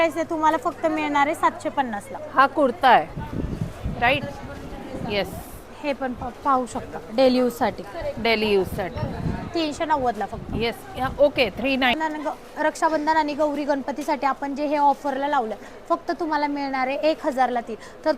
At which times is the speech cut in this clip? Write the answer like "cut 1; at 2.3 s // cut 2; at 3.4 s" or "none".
cut 1; at 11.9 s